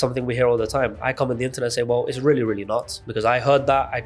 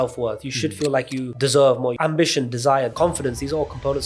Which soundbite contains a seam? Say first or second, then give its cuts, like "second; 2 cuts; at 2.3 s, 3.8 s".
second; 3 cuts; at 1.3 s, 2.0 s, 2.9 s